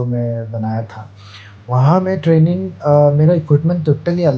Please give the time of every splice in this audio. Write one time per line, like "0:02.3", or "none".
none